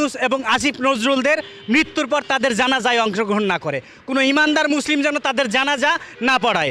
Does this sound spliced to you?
no; 0 cuts

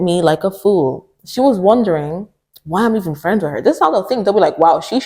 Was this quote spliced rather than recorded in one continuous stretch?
no; 0 cuts

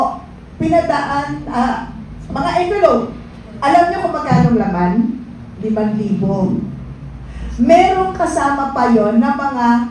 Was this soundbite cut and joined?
no; 0 cuts

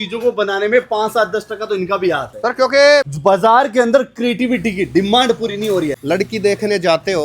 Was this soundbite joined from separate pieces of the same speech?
yes; 2 cuts; at 3.1 s, 6.0 s

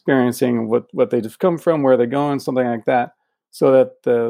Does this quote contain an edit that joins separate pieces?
no; 0 cuts

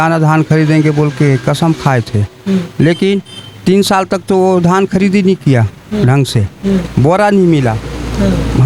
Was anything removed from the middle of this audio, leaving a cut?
no; 0 cuts

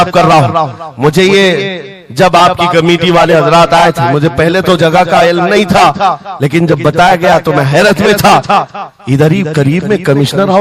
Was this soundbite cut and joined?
no; 0 cuts

